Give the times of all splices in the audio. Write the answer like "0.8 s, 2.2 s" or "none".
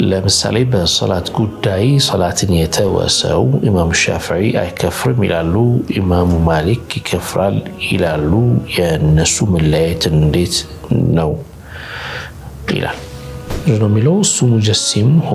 13.5 s